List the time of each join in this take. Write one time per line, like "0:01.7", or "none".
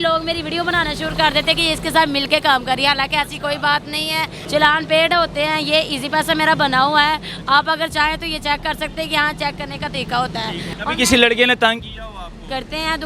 0:04.4
0:10.7